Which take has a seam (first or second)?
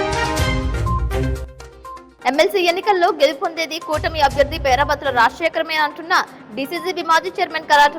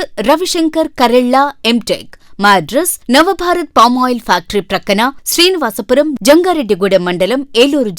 first